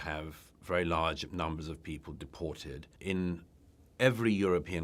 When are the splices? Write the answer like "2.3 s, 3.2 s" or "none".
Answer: 2.9 s